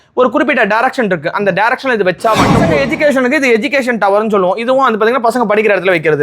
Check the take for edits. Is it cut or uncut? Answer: cut